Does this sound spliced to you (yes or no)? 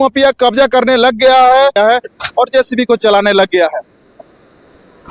yes